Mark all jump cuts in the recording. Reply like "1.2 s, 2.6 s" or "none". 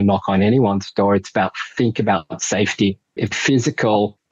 3.3 s